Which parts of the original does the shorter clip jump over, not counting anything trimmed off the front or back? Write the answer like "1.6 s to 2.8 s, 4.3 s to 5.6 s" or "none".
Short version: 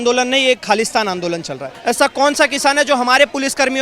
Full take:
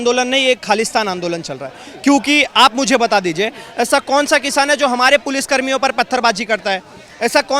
1.7 s to 3.6 s